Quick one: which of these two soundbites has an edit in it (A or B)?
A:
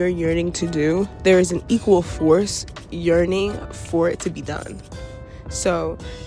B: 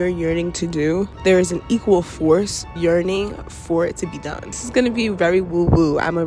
B